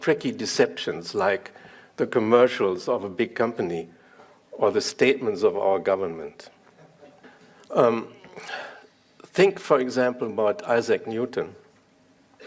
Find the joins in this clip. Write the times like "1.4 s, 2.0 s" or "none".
5.8 s